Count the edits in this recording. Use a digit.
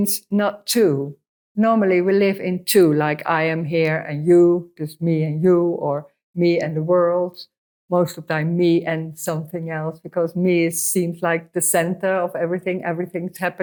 0